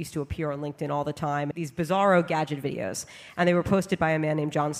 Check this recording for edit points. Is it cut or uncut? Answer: cut